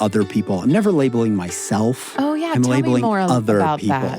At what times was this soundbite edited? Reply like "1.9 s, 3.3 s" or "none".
2.0 s